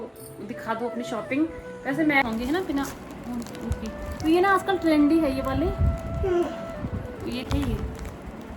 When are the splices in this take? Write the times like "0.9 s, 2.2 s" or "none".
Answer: 2.2 s, 7.4 s